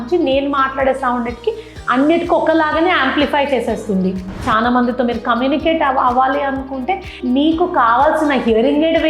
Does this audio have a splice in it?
yes; 1 cut; at 4.3 s

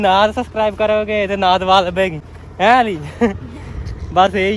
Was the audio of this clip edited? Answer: no; 0 cuts

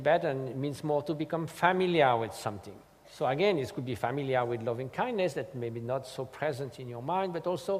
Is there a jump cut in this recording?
yes; 1 cut; at 6.7 s

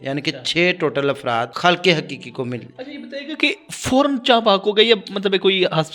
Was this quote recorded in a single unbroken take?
no; 1 cut; at 1.5 s

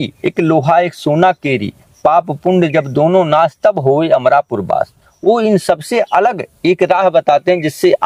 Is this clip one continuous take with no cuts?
yes; 0 cuts

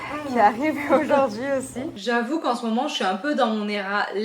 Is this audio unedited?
no; 1 cut; at 1.9 s

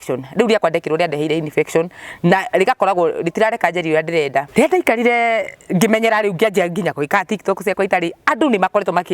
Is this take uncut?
no; 1 cut; at 4.5 s

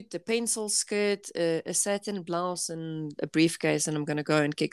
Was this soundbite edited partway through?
no; 0 cuts

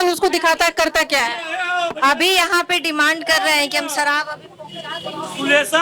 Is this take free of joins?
yes; 0 cuts

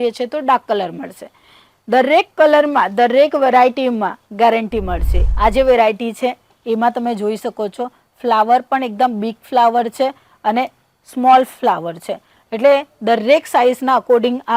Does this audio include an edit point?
yes; 1 cut; at 5.2 s

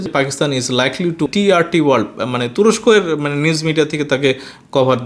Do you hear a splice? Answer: yes; 1 cut; at 1.3 s

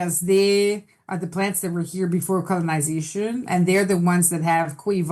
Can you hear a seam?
no; 0 cuts

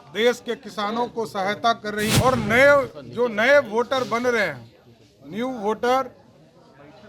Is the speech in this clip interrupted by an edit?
yes; 1 cut; at 2.1 s

